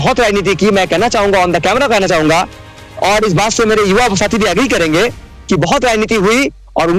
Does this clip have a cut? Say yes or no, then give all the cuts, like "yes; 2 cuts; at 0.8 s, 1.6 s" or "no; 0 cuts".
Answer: no; 0 cuts